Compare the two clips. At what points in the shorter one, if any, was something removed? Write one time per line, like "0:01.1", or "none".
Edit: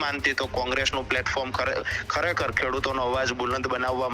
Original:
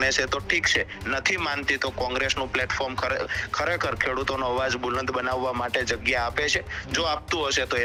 none